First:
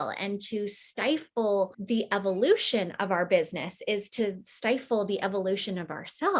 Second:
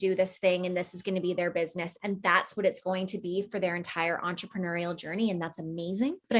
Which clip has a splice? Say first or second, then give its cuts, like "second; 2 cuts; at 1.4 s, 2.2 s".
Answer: first; 1 cut; at 1.8 s